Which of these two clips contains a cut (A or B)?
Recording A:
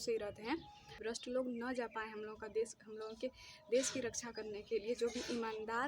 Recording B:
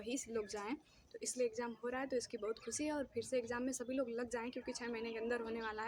A